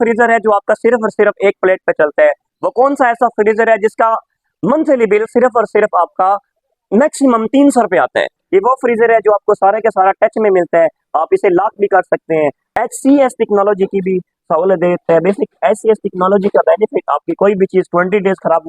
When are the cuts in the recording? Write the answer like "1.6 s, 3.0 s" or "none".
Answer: 8.4 s, 12.6 s